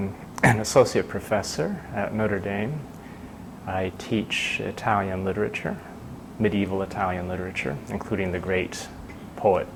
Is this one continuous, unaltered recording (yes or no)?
yes